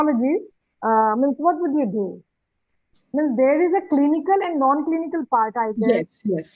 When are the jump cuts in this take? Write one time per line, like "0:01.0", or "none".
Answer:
none